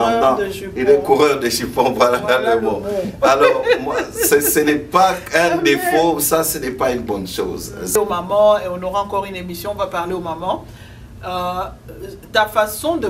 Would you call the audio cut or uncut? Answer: cut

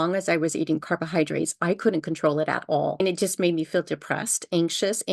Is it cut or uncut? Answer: cut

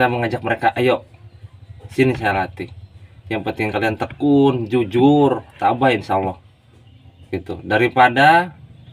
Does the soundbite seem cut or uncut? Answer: uncut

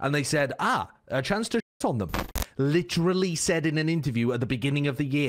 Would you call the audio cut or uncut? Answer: cut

